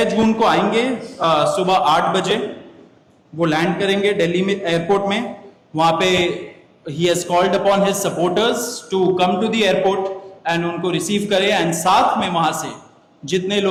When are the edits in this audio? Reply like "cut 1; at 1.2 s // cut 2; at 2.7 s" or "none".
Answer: none